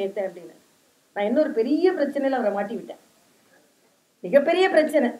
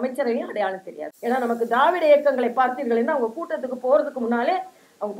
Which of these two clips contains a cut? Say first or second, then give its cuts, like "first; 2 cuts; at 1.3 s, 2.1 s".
second; 1 cut; at 1.0 s